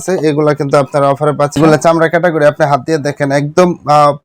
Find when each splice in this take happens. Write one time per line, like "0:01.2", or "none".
0:01.6